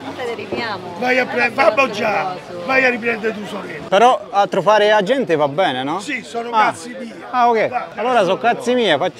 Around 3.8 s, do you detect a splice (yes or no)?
yes